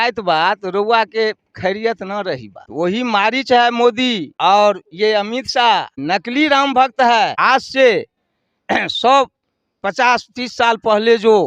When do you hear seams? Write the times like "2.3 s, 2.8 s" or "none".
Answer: 2.6 s, 4.3 s, 5.9 s, 7.3 s